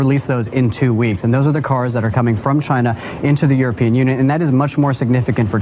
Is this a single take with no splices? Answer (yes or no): yes